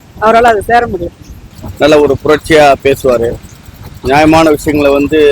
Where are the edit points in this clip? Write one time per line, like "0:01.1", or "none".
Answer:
0:01.3